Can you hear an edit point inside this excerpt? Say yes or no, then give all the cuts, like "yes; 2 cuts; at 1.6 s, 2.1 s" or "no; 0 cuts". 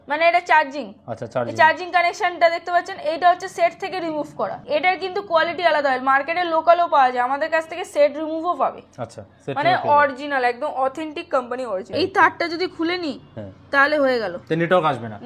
yes; 2 cuts; at 4.6 s, 11.9 s